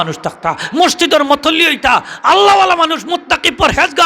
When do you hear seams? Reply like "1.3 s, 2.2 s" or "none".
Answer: none